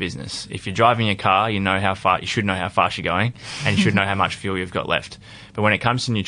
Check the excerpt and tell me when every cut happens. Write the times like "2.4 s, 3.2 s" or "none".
none